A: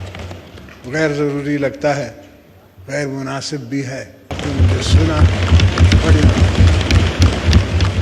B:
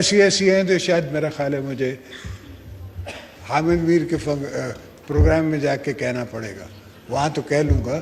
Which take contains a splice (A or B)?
A